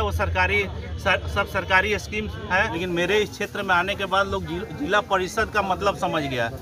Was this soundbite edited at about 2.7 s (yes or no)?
yes